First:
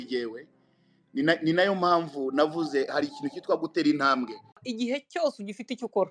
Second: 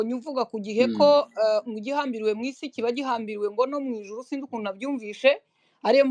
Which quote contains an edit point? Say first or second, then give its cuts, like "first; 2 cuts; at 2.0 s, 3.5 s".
first; 1 cut; at 4.6 s